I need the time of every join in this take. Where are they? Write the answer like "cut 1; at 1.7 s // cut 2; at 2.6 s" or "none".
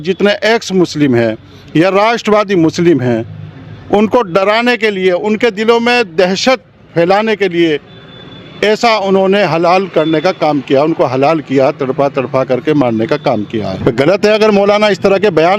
cut 1; at 13.7 s